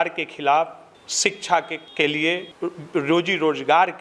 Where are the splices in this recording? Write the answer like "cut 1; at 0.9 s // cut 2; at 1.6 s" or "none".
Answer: none